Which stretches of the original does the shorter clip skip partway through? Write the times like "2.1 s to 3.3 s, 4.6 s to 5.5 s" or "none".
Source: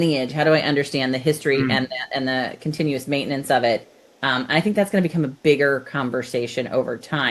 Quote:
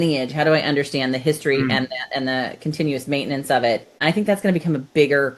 3.9 s to 4.4 s